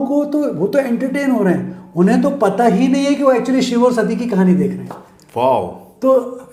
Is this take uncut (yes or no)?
yes